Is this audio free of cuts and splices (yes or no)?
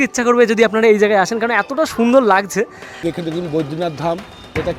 no